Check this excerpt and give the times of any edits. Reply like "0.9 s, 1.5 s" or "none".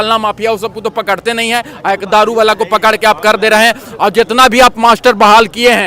none

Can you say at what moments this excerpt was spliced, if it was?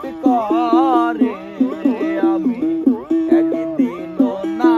none

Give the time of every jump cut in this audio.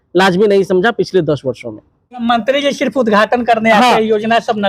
2.2 s

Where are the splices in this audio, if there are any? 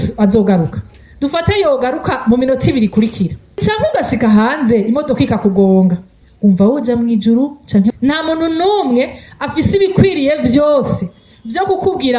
3.6 s, 6.2 s, 7.9 s

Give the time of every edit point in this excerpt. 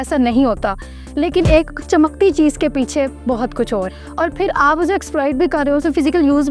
4.0 s

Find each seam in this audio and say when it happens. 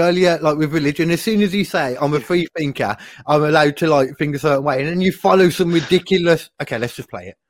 none

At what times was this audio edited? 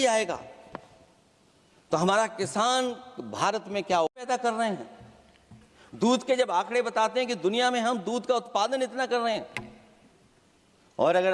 4.1 s

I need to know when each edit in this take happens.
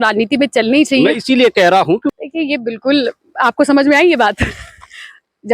2.1 s

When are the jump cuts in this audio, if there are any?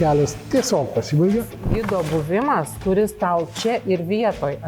1.6 s

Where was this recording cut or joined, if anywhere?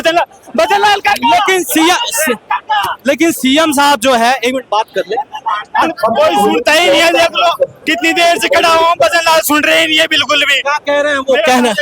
5.8 s

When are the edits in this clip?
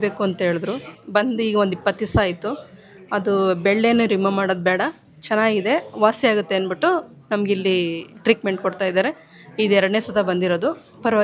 1.0 s

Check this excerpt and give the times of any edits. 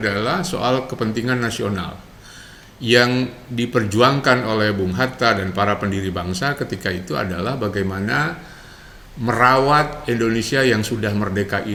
none

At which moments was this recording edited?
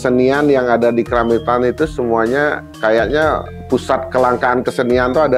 none

